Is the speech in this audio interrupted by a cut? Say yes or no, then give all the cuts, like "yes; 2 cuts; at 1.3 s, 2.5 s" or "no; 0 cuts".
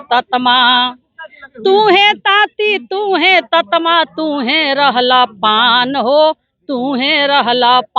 no; 0 cuts